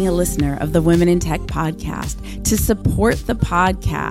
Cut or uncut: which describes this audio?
uncut